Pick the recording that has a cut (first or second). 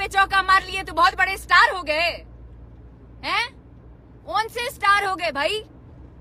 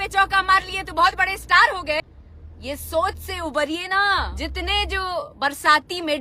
second